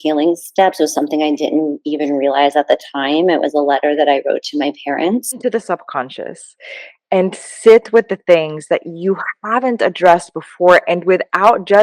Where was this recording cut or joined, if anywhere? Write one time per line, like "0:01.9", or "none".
0:05.4